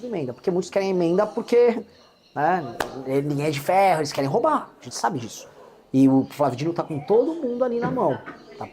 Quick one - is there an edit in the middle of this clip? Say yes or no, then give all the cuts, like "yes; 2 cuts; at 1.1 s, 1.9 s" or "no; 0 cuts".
no; 0 cuts